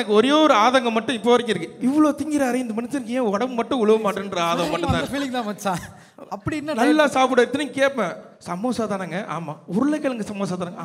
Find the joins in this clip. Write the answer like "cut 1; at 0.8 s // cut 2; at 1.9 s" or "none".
none